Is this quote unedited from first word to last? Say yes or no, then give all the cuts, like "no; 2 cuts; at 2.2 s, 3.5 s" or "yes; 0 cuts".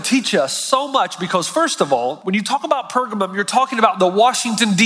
no; 1 cut; at 2.2 s